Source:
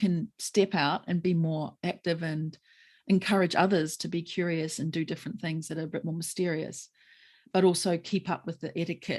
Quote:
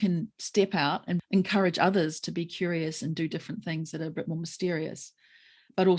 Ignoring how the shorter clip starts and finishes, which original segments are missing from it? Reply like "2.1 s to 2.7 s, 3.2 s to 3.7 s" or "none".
1.2 s to 3.0 s